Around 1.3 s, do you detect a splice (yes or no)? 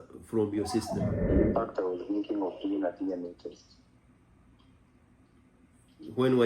yes